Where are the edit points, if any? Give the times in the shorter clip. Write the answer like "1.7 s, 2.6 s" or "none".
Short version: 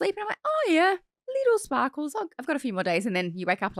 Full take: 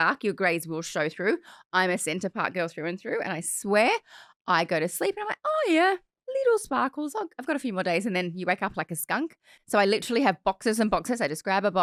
none